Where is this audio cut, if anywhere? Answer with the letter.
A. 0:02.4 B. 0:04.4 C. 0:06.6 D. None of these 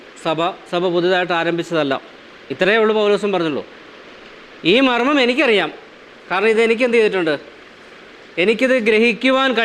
A